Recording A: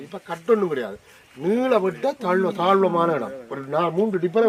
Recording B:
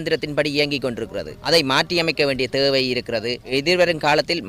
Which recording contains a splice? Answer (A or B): B